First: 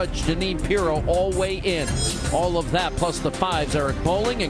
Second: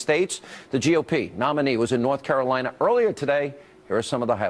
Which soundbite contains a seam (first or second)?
first